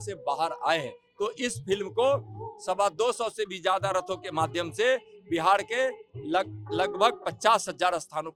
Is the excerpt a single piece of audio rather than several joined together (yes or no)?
yes